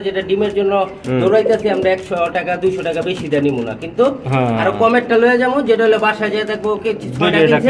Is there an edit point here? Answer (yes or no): no